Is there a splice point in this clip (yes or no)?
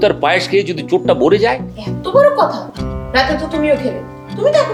no